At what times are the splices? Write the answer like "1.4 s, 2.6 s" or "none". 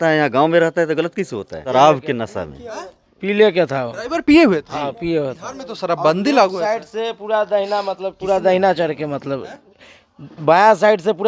1.7 s